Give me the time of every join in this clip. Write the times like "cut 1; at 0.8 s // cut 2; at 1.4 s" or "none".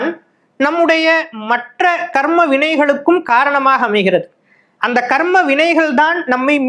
none